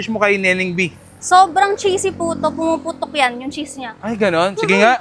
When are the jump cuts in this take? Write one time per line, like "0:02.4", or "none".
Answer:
none

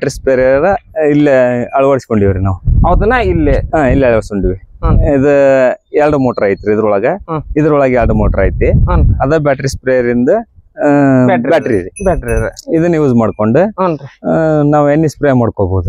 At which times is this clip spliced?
none

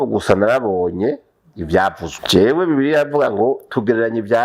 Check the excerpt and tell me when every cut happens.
0:02.1

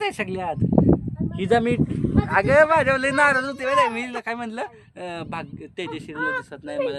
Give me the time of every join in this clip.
none

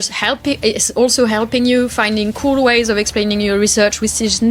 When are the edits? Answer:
none

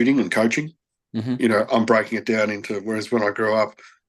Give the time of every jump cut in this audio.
none

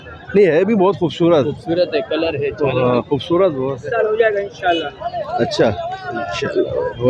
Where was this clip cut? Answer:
0:03.8

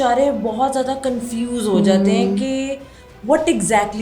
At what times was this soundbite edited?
none

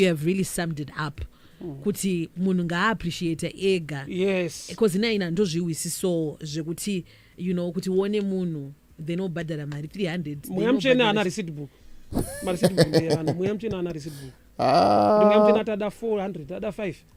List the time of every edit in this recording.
none

